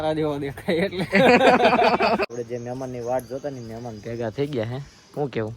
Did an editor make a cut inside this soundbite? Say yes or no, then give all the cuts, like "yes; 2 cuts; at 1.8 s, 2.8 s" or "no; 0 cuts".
yes; 1 cut; at 2.3 s